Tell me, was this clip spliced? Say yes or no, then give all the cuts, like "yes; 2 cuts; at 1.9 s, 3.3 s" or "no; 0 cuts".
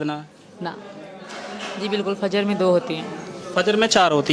yes; 1 cut; at 0.9 s